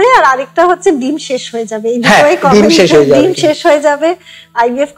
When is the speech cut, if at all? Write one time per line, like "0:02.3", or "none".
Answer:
none